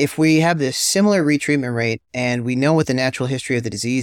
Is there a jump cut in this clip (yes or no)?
no